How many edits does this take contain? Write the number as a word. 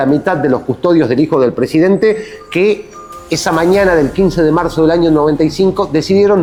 zero